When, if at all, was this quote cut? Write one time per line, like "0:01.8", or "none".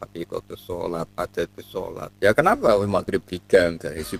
0:02.1